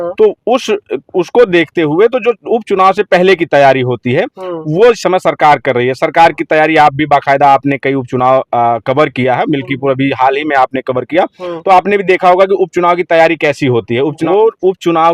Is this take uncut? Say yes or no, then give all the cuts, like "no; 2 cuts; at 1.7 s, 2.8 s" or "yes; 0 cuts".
no; 1 cut; at 14.2 s